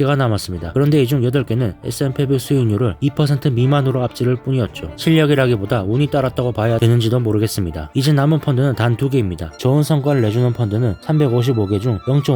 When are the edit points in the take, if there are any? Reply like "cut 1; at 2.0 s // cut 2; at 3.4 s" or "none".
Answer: cut 1; at 9.6 s